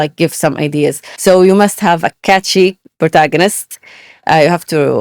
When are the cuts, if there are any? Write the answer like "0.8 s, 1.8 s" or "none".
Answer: 1.1 s